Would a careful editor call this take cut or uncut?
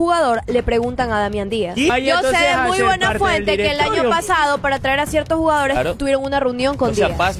uncut